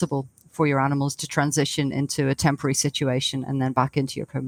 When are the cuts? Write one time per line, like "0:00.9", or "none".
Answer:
none